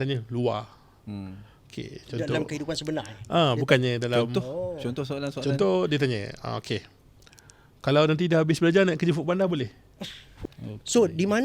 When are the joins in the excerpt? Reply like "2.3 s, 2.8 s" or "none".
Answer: 10.3 s